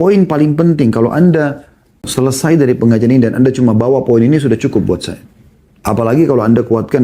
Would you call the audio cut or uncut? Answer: cut